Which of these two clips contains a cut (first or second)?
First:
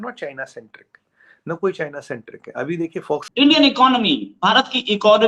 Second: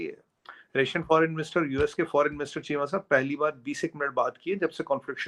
first